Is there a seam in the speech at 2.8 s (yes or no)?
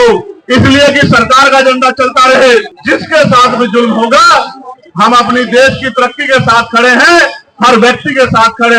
yes